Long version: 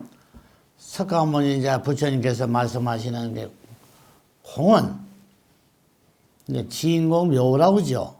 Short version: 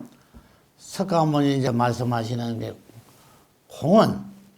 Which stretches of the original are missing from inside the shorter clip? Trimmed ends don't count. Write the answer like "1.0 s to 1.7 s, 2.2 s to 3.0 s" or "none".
1.7 s to 2.4 s